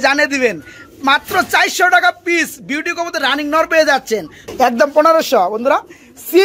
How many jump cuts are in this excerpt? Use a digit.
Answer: 1